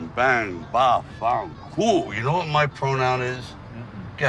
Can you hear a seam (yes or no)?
yes